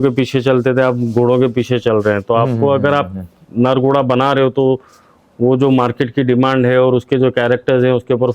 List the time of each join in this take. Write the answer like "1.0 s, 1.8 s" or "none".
none